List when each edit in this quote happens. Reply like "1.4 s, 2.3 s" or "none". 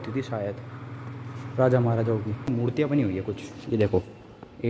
2.5 s